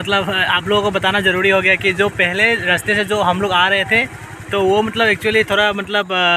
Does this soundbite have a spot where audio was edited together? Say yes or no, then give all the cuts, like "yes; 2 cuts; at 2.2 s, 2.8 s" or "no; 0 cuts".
no; 0 cuts